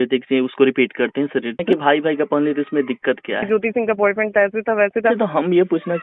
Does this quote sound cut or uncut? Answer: cut